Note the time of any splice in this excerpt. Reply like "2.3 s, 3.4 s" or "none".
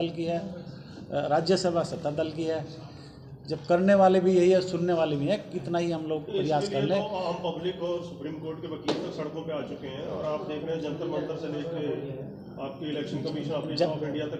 none